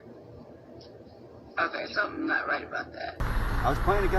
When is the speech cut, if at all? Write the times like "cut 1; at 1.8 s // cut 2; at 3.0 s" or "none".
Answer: cut 1; at 3.2 s